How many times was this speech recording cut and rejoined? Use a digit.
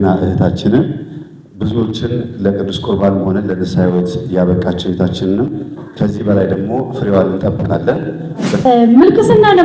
1